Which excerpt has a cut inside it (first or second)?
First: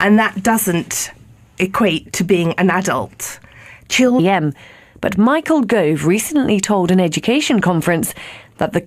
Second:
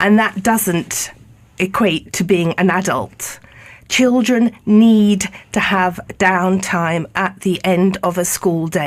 second